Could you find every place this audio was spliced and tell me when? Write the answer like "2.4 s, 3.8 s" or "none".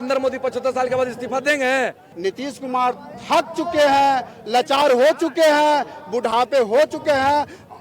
2.0 s